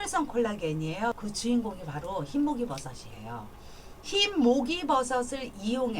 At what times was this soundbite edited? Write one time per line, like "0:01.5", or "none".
0:01.2